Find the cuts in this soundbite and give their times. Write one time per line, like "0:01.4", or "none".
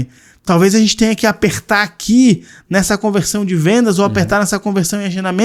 none